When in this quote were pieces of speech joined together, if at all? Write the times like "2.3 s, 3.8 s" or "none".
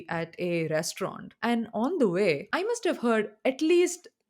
1.3 s, 2.5 s